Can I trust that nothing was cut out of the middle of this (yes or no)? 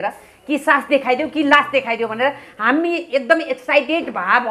yes